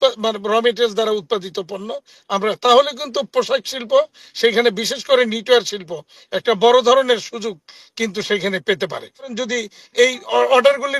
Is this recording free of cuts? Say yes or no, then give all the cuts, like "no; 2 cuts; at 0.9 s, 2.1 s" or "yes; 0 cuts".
no; 1 cut; at 9.4 s